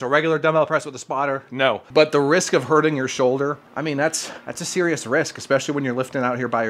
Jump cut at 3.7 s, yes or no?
yes